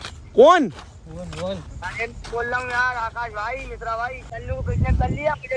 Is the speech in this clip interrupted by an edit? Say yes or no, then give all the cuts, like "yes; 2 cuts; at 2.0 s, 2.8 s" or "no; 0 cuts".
yes; 1 cut; at 4.3 s